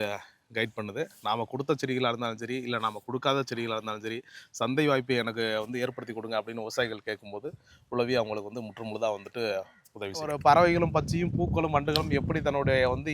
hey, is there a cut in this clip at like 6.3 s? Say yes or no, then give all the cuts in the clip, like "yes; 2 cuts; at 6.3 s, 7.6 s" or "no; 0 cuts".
no; 1 cut; at 10.3 s